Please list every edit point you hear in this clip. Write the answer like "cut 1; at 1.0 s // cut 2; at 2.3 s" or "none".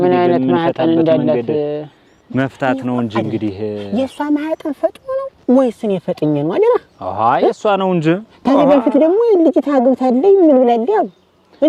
none